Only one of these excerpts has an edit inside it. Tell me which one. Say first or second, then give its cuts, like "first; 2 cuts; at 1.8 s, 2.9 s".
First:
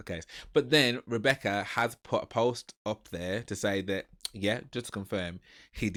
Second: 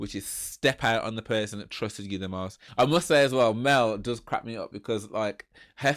second; 1 cut; at 2.7 s